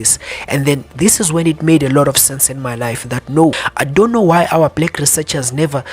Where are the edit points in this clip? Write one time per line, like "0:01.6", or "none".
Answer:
0:03.7